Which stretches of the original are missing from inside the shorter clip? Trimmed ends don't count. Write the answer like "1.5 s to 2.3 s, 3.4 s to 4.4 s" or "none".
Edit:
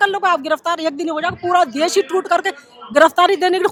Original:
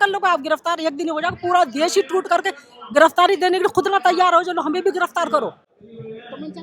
none